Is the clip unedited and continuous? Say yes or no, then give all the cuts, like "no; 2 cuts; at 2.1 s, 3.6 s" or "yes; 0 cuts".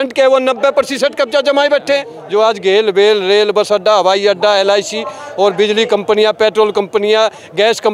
no; 1 cut; at 2.1 s